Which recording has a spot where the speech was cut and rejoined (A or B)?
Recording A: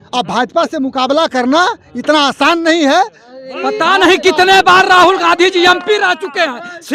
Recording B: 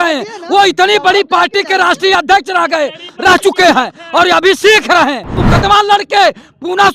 B